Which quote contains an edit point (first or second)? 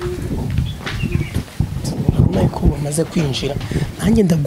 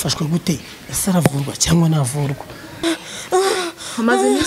second